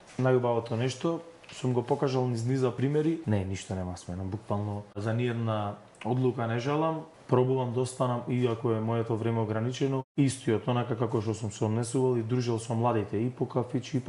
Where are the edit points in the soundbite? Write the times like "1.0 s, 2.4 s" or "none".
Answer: 2.9 s, 5.0 s, 7.1 s, 10.1 s